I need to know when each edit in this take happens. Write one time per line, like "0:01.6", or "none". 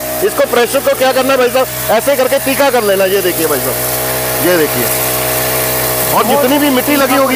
none